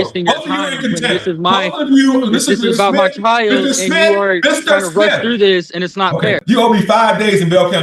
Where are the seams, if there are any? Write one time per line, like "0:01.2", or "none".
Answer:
0:06.4